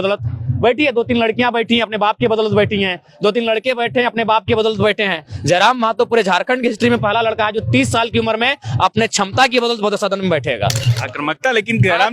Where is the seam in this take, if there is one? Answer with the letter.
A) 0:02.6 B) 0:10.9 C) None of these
B